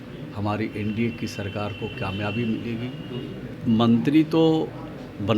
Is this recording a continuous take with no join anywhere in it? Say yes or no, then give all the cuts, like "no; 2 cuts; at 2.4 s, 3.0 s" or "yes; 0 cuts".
no; 1 cut; at 3.5 s